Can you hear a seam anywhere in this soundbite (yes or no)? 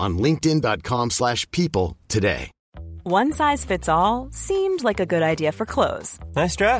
yes